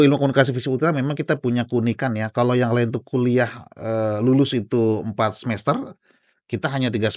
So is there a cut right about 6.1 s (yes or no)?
no